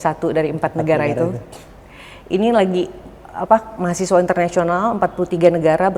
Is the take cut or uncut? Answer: uncut